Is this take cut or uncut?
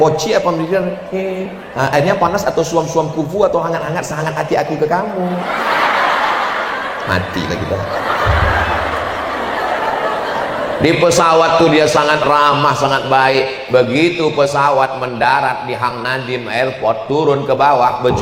uncut